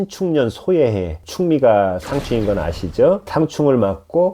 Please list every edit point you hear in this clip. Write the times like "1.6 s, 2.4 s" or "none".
1.2 s, 3.3 s